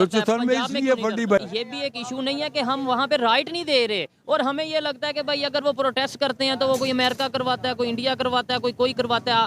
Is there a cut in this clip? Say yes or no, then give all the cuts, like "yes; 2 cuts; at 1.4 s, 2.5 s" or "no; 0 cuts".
yes; 1 cut; at 1.4 s